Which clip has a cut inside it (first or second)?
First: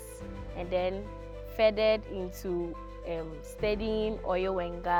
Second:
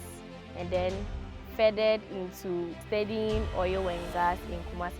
second